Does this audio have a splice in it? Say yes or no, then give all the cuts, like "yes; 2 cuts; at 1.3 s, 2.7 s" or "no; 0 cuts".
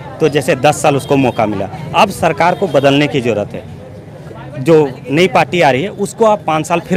no; 0 cuts